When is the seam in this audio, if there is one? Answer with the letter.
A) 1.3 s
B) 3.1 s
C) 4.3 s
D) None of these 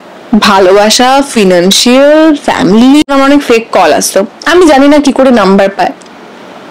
B